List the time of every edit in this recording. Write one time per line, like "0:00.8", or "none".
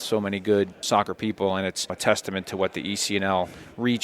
0:00.8
0:02.0